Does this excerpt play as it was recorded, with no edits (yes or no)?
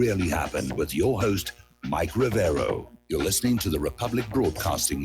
no